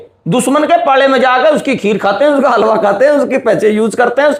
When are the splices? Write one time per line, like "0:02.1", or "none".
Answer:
none